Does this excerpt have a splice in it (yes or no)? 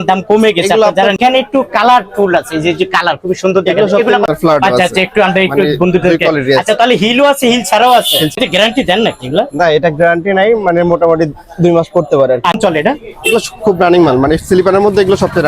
yes